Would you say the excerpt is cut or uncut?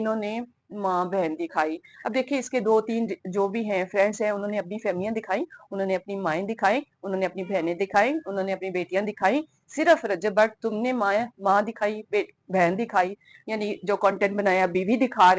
uncut